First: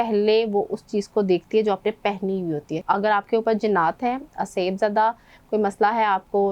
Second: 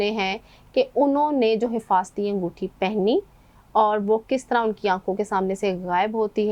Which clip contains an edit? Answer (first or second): first